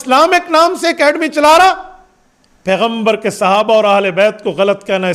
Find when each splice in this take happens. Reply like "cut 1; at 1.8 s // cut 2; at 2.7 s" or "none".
none